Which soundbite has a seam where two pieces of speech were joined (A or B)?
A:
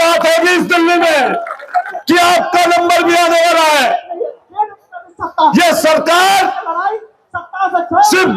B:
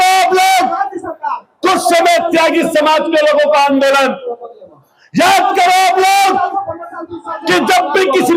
A